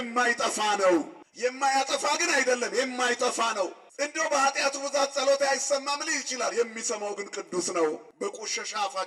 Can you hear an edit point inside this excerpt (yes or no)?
yes